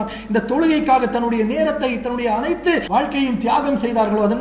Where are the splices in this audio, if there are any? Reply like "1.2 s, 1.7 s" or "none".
2.8 s